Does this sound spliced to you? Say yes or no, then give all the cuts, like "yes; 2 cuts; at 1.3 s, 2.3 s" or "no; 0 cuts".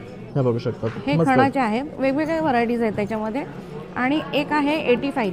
no; 0 cuts